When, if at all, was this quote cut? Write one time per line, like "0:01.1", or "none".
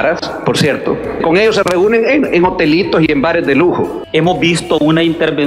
0:01.2
0:04.0